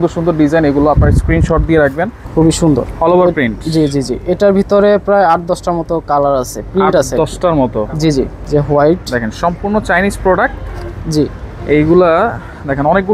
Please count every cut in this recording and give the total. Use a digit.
2